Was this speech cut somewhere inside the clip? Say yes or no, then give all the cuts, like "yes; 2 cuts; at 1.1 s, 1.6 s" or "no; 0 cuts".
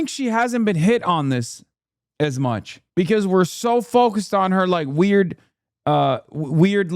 yes; 1 cut; at 2.8 s